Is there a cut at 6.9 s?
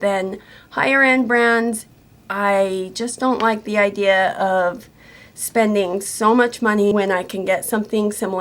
yes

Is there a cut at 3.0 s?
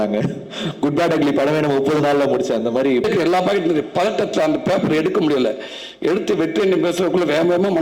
yes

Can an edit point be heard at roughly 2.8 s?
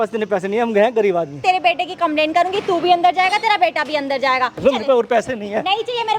no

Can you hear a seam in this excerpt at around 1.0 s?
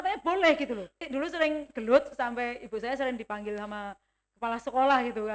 yes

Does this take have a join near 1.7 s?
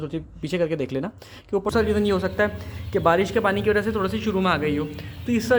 yes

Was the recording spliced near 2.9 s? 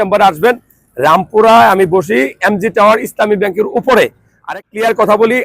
no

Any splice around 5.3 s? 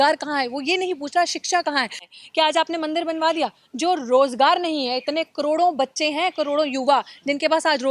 no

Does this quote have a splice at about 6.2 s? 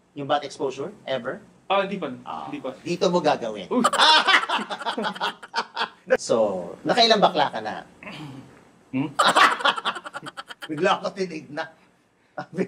yes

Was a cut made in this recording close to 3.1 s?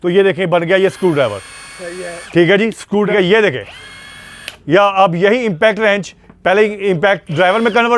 yes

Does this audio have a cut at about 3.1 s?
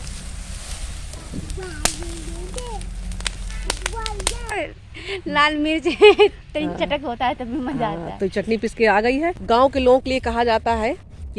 no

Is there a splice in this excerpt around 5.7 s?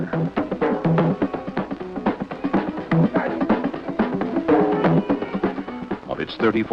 yes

